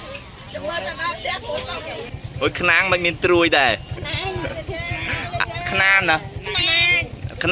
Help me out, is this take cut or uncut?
cut